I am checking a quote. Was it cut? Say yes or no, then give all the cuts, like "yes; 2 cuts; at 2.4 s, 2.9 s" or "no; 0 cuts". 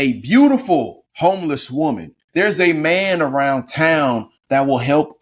yes; 2 cuts; at 1.0 s, 2.1 s